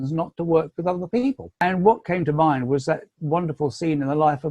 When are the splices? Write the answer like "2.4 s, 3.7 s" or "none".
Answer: 1.6 s